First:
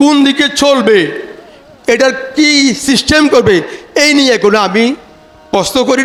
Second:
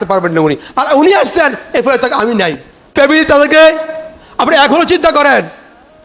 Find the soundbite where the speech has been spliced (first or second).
second